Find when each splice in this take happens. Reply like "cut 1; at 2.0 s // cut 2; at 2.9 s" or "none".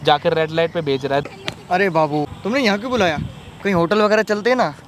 cut 1; at 1.3 s // cut 2; at 2.3 s